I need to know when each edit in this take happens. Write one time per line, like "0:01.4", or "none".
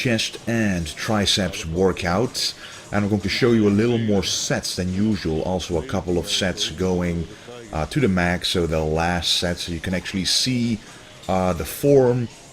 0:04.5